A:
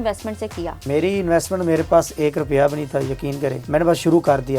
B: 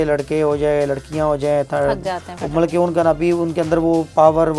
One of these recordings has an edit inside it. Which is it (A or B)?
A